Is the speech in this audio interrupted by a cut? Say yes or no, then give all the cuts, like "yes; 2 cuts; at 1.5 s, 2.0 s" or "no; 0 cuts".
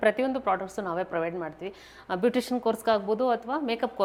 no; 0 cuts